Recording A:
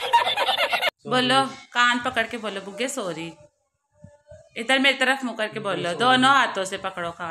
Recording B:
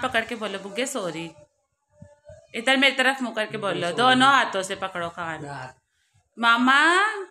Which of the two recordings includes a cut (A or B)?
A